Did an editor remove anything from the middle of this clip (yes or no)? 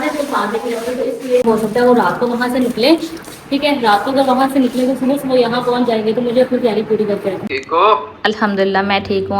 yes